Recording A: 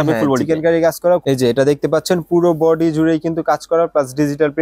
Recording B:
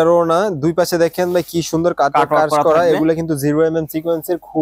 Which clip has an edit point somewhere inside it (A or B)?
A